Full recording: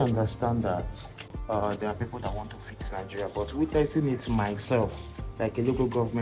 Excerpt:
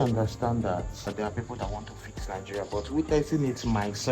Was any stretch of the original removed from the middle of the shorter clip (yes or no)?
yes